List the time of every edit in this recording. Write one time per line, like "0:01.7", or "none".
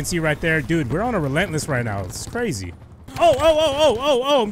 0:03.0